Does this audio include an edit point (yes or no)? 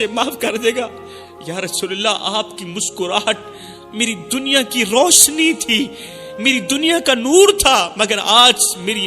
no